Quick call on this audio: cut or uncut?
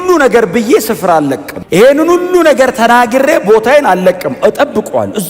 uncut